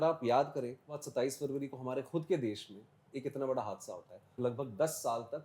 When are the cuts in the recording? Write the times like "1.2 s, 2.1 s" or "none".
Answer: 1.0 s, 4.3 s

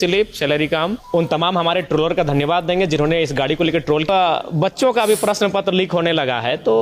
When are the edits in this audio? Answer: 1.0 s, 4.1 s

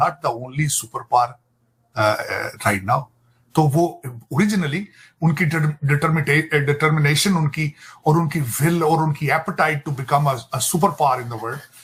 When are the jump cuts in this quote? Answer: none

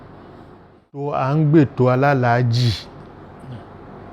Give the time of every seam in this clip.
1.1 s

